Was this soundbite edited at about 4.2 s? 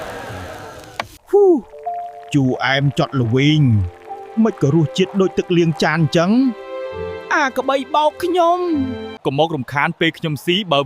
no; 2 cuts; at 1.1 s, 9.2 s

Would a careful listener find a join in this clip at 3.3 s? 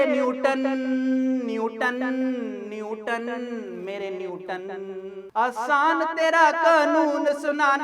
no; 0 cuts

